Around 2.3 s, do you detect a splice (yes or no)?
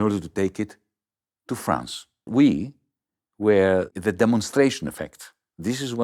yes